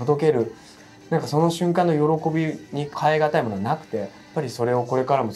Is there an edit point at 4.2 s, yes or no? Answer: yes